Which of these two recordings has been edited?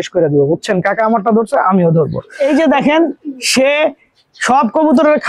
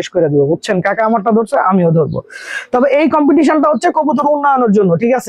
first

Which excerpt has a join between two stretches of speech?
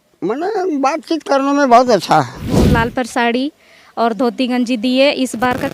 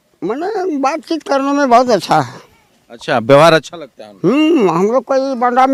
first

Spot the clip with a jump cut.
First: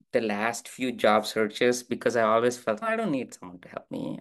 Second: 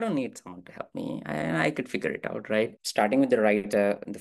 second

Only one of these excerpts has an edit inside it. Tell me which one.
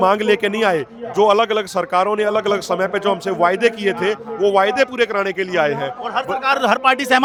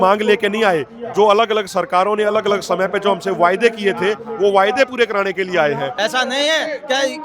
second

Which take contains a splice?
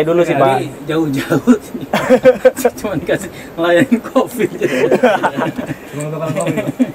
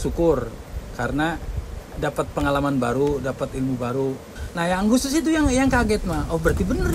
second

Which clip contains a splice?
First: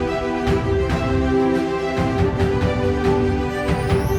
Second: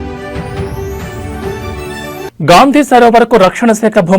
second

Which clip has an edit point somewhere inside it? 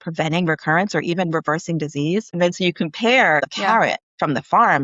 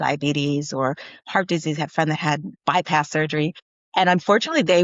first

